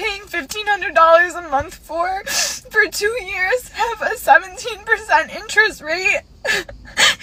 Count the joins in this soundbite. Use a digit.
0